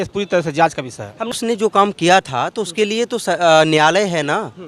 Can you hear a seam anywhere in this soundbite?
yes; 1 cut; at 1.3 s

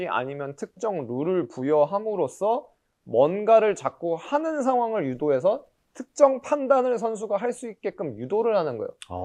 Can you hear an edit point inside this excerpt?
no; 0 cuts

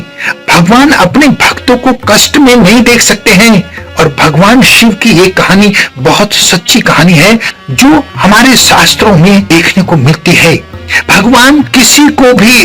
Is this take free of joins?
yes; 0 cuts

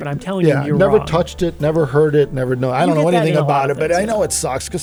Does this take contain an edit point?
no; 0 cuts

